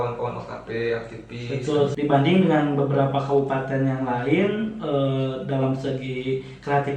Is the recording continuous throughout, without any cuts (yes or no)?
no